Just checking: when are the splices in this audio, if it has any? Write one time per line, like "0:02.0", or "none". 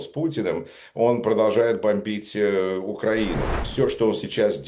0:03.6